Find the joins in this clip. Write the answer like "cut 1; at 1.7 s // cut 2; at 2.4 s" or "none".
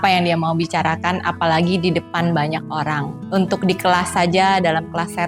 none